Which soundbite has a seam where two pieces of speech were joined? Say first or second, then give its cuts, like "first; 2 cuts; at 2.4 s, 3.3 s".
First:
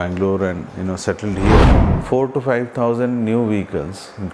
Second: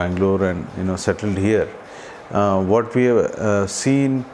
first; 1 cut; at 1.9 s